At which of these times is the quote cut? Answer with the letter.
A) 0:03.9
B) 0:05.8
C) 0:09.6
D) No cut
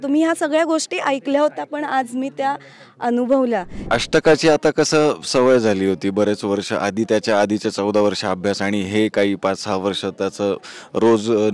A